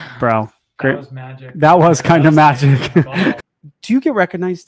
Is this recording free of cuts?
no; 1 cut; at 3.4 s

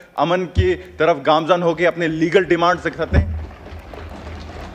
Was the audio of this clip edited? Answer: no; 0 cuts

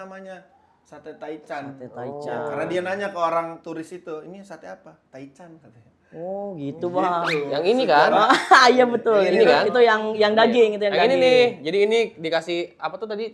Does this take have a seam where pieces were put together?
no; 0 cuts

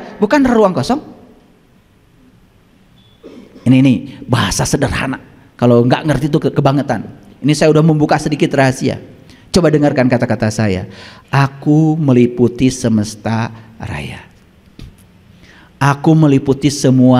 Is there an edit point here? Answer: no; 0 cuts

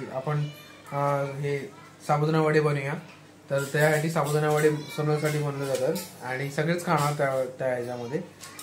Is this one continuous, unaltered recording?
yes; 0 cuts

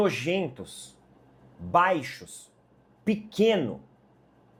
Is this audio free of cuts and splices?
yes; 0 cuts

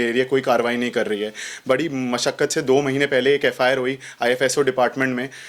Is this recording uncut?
yes; 0 cuts

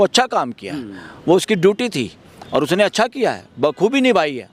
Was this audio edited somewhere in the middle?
no; 0 cuts

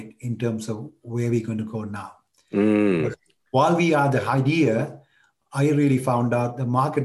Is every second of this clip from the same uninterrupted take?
yes; 0 cuts

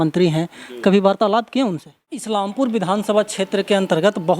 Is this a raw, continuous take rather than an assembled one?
no; 1 cut; at 2.3 s

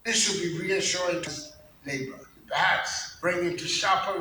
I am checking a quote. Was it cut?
yes; 2 cuts; at 2.3 s, 3.0 s

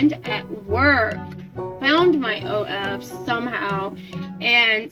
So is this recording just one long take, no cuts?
yes; 0 cuts

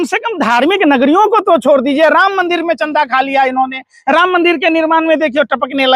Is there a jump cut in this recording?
no; 0 cuts

